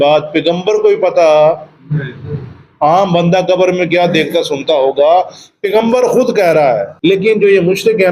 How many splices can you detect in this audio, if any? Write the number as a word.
one